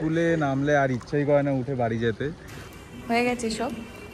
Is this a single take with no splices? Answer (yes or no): no